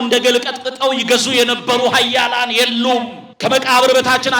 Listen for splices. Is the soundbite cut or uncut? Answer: cut